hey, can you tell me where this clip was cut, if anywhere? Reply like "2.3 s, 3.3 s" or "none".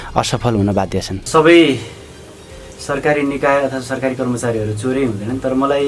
1.2 s